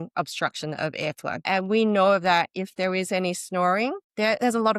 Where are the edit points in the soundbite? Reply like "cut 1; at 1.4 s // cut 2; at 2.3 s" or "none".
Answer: cut 1; at 1.4 s